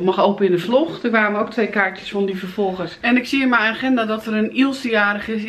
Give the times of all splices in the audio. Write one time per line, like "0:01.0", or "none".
0:02.9